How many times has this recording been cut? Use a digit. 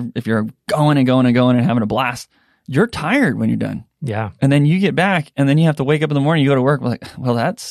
0